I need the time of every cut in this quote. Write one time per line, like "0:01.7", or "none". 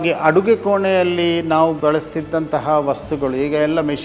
0:01.8